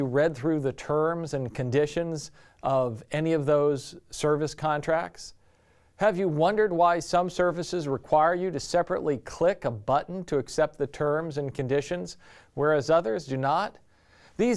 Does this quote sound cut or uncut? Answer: uncut